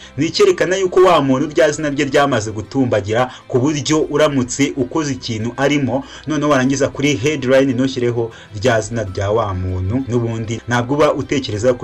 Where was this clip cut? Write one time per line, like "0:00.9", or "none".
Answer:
0:10.1